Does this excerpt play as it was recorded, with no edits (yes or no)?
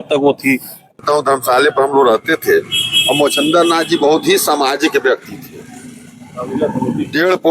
no